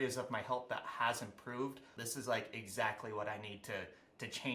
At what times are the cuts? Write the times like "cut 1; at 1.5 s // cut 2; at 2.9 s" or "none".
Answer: cut 1; at 1.9 s